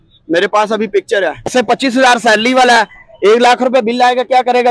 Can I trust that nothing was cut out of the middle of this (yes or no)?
no